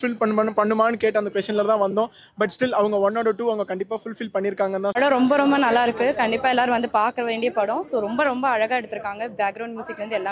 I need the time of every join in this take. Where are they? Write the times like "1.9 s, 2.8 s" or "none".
4.9 s

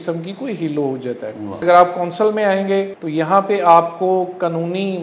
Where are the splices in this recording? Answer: 1.6 s, 3.0 s

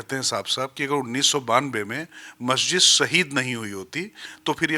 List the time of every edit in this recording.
none

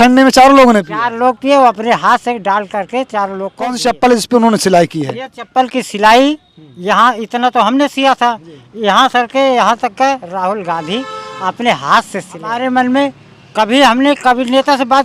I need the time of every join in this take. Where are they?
3.8 s, 12.5 s

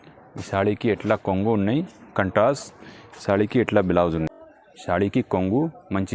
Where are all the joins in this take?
4.3 s

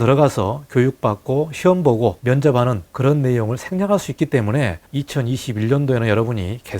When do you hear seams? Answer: 2.2 s, 2.9 s, 4.8 s

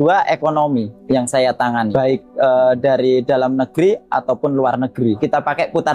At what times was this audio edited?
1.0 s, 1.9 s, 5.2 s

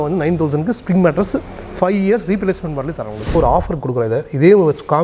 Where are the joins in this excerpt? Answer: 3.3 s

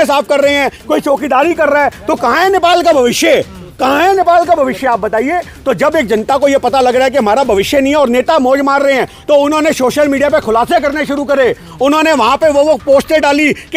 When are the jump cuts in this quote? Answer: none

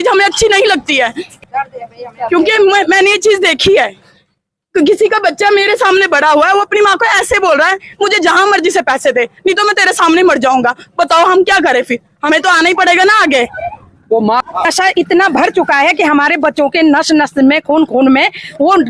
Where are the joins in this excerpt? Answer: 1.3 s, 14.4 s

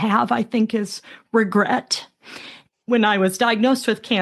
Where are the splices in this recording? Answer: none

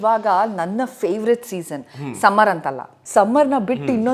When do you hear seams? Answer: 2.9 s

